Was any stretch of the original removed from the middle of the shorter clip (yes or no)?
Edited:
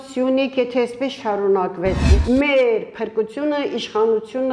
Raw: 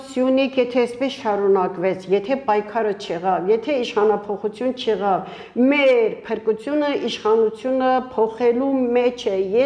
yes